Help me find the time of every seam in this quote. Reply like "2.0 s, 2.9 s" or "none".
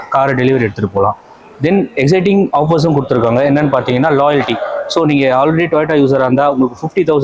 none

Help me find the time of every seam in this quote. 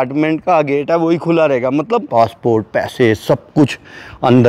2.1 s

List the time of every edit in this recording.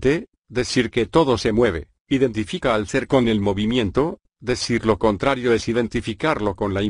none

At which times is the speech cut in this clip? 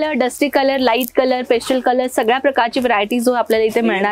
none

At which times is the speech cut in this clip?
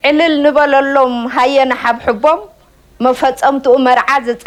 none

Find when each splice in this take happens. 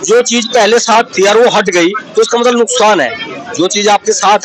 none

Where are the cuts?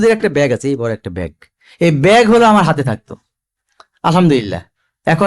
none

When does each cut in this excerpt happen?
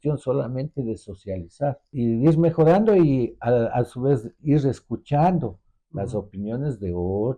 1.8 s

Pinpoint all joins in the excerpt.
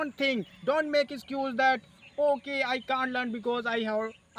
none

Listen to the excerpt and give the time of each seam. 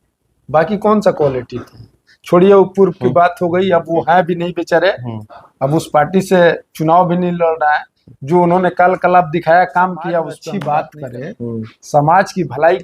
10.4 s

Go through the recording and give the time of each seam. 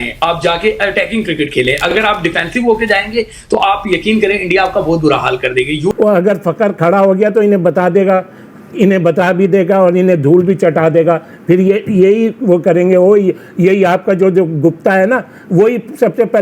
5.9 s

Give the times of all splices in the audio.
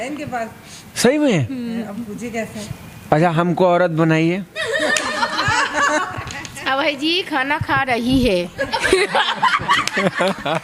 none

